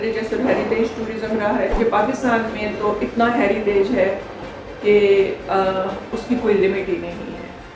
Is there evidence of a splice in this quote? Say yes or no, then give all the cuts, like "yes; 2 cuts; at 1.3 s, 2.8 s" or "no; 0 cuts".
yes; 1 cut; at 1.7 s